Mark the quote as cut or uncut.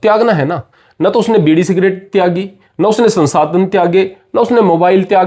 uncut